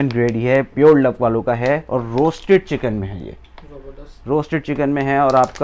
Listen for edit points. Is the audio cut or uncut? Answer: uncut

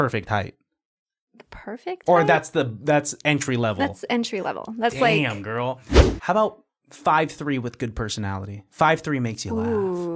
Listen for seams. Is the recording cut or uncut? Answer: cut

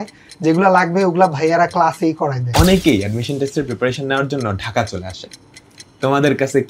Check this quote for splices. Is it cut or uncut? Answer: cut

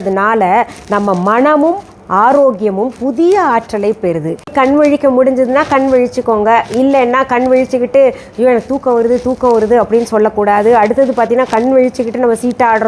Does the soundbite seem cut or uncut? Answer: cut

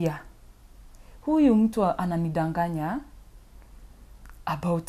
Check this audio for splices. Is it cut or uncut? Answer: uncut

